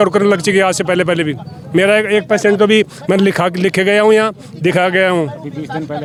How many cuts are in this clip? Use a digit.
0